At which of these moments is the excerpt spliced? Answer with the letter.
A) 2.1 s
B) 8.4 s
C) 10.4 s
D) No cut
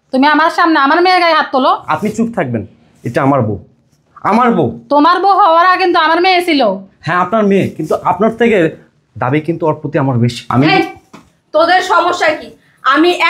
C